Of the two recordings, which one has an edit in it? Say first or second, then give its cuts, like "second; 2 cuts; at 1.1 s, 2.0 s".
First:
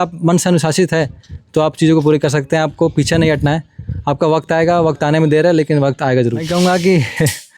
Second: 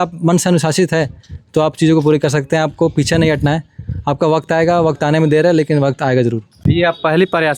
first; 1 cut; at 6.5 s